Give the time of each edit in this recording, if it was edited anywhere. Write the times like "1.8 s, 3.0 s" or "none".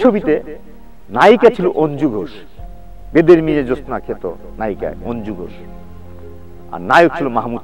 none